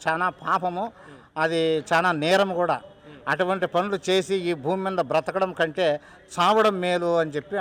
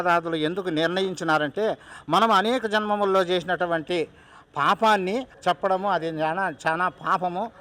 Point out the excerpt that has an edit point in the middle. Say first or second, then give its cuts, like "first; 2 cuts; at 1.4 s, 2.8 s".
second; 1 cut; at 5.3 s